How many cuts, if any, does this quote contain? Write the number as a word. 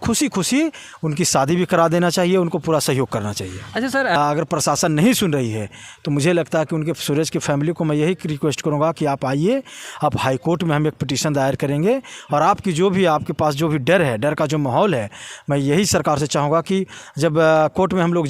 one